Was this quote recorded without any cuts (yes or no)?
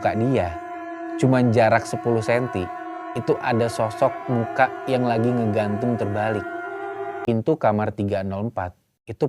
no